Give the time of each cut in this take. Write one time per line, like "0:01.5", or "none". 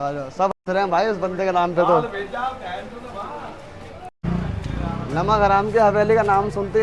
0:04.2